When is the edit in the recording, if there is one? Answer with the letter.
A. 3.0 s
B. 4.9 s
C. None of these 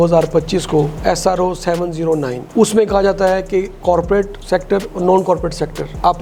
C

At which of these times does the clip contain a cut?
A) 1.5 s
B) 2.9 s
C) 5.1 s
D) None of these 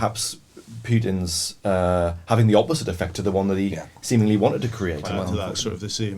C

